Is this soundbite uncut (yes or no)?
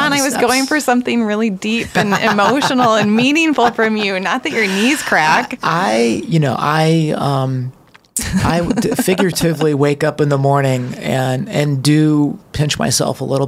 yes